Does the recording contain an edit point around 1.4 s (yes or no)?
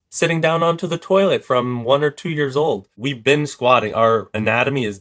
no